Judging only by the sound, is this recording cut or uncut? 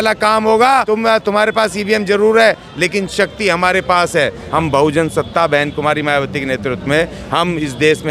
cut